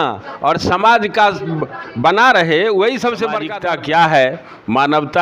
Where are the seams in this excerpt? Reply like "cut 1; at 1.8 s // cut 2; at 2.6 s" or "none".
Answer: cut 1; at 3.5 s